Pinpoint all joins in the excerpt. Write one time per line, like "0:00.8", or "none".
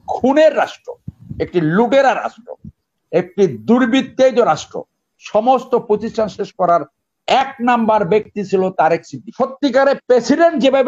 0:09.2